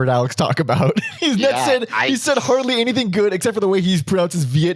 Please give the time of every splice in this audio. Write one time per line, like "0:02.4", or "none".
0:01.1

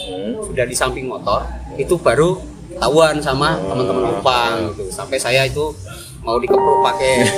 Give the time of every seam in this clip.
none

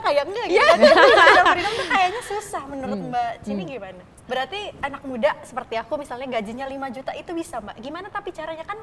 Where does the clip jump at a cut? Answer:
0:04.2

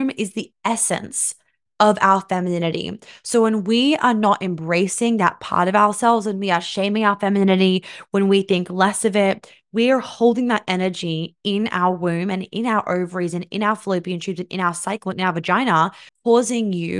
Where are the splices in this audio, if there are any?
0:16.1

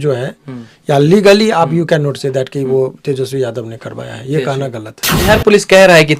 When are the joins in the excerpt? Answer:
0:05.2

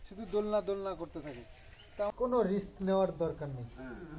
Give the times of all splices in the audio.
0:02.1

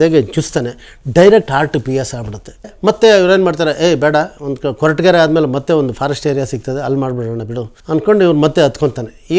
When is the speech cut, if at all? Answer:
0:02.6
0:07.7

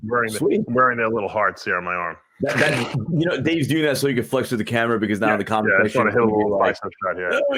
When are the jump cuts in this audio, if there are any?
none

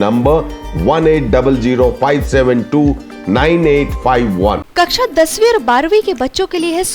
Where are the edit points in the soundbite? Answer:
0:04.6

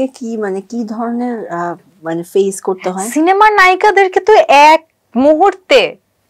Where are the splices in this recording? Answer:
none

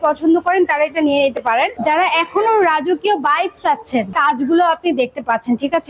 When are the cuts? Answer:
0:01.7
0:04.1

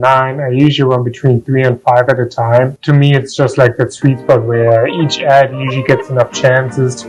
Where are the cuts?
none

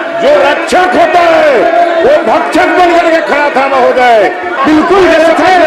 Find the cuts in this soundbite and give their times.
0:04.5

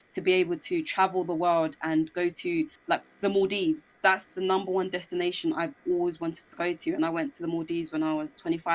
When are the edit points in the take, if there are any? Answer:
0:02.8

